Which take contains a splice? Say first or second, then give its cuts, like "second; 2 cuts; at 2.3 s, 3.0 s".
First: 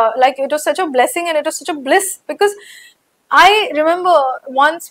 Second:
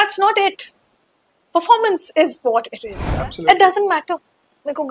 second; 1 cut; at 3.1 s